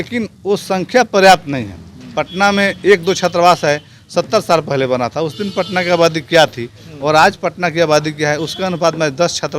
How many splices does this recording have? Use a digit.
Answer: 0